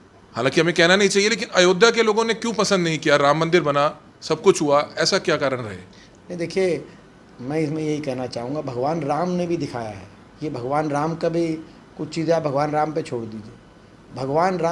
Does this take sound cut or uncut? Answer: uncut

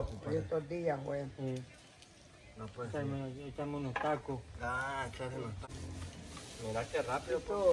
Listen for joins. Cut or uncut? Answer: cut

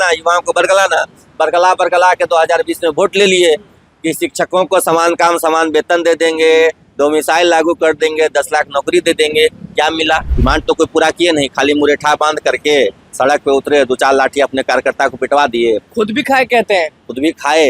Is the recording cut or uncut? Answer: cut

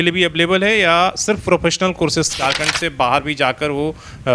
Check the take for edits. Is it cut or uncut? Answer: cut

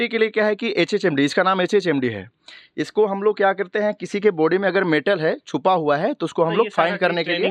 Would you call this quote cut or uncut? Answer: uncut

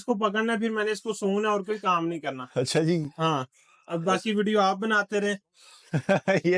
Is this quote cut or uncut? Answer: uncut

